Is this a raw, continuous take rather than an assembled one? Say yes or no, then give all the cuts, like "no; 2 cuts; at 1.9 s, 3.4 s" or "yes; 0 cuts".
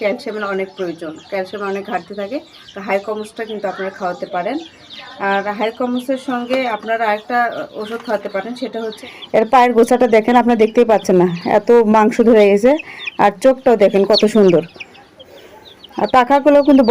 no; 1 cut; at 9.1 s